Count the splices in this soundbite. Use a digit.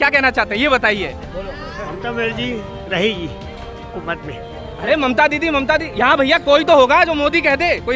0